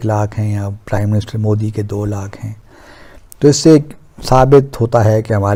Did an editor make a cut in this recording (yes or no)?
no